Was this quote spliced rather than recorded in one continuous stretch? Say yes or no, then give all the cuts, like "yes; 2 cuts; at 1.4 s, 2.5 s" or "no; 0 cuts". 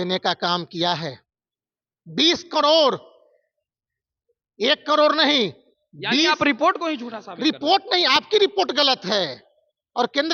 no; 0 cuts